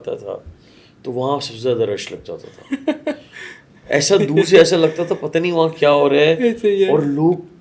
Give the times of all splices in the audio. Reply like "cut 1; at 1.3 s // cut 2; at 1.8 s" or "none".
none